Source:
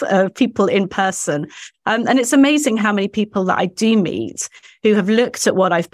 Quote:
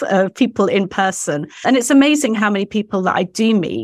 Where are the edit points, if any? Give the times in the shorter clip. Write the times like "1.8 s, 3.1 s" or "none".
1.6 s